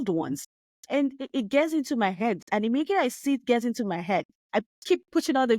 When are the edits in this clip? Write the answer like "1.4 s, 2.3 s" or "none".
4.7 s